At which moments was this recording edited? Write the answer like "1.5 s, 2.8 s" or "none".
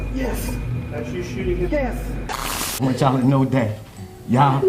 2.5 s